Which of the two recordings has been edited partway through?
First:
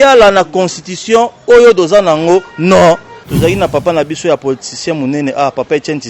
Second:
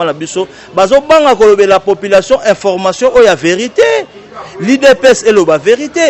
first; 1 cut; at 3.2 s

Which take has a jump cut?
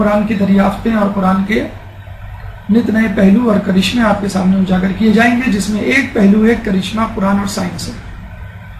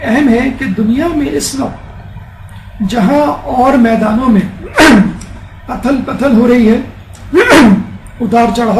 first; 1 cut; at 6.8 s

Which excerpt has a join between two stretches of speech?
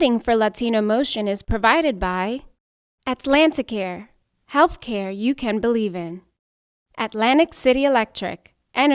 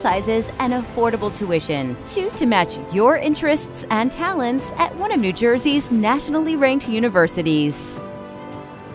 second; 1 cut; at 7.8 s

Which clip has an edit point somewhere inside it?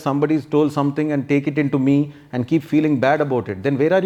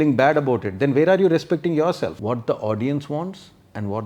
second; 1 cut; at 2.1 s

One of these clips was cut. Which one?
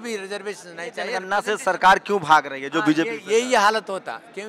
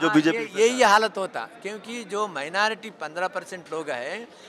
first; 1 cut; at 1.2 s

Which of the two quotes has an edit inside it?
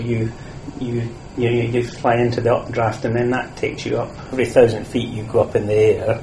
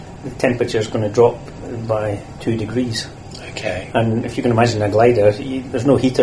first; 2 cuts; at 1.3 s, 4.3 s

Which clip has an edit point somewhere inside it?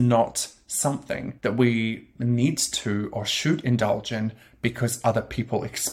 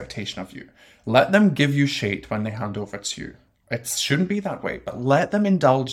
first; 1 cut; at 1.3 s

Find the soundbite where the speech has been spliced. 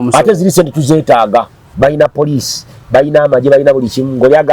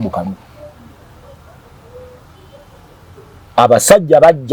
first; 1 cut; at 1.6 s

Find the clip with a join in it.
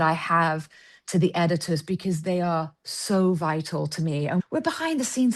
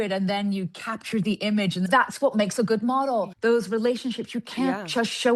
second; 2 cuts; at 1.9 s, 3.3 s

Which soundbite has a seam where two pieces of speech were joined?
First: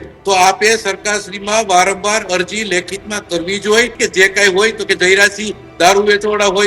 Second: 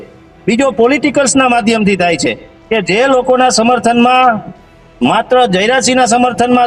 first; 1 cut; at 3.9 s

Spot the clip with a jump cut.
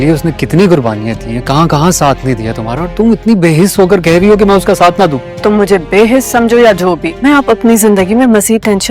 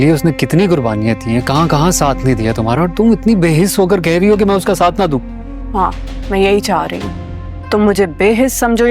first; 2 cuts; at 5.3 s, 7.1 s

